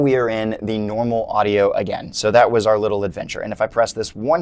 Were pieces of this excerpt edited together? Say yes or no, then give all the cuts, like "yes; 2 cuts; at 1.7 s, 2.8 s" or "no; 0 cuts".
no; 0 cuts